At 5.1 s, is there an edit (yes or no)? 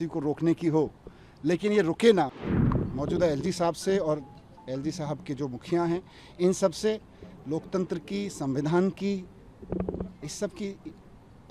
no